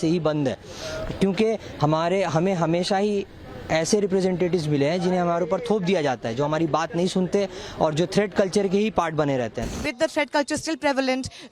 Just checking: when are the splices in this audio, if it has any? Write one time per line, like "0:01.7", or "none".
0:09.7